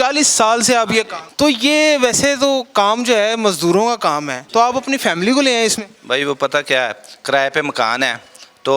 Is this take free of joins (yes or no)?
no